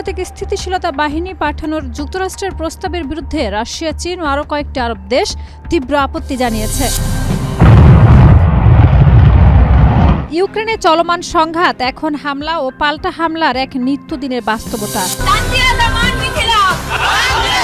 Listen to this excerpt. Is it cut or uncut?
cut